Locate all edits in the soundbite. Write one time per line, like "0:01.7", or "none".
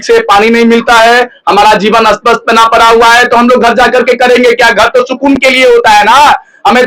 none